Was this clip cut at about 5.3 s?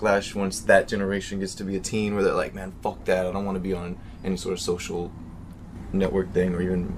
no; 1 cut; at 1.1 s

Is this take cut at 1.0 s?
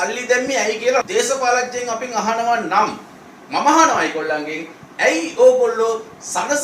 yes; 1 cut; at 1.0 s

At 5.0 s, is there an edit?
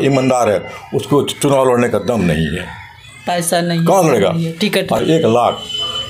yes; 1 cut; at 5.0 s

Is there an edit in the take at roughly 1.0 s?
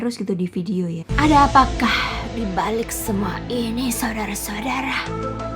yes; 1 cut; at 1.0 s

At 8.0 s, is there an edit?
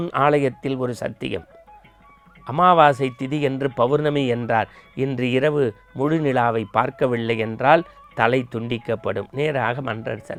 no; 0 cuts

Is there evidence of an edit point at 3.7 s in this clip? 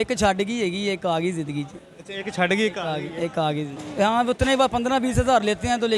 yes; 1 cut; at 3.7 s

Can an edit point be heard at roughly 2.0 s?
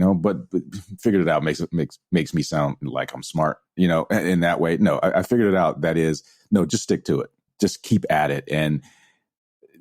no; 1 cut; at 7.4 s

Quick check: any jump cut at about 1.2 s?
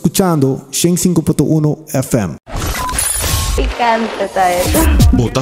no; 1 cut; at 2.7 s

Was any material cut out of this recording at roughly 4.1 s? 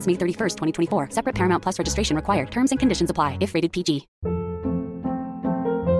yes; 1 cut; at 4.1 s

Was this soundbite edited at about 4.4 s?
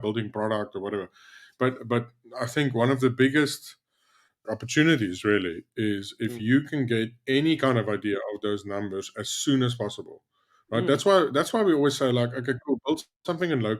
yes; 1 cut; at 4.4 s

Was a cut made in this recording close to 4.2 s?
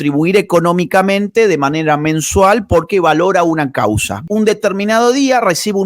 yes; 1 cut; at 4.2 s

